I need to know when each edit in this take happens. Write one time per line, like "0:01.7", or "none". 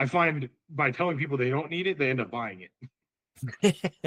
none